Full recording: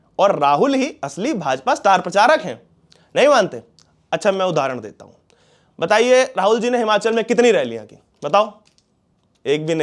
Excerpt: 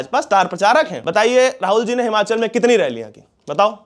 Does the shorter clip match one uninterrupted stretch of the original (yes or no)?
no